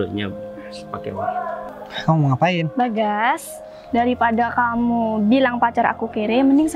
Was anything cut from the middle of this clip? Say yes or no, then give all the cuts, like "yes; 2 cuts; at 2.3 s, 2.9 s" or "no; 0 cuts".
yes; 1 cut; at 1.7 s